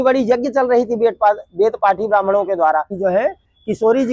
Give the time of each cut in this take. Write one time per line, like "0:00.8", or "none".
0:02.9